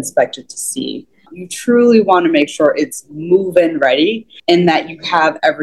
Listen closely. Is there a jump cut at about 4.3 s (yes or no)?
yes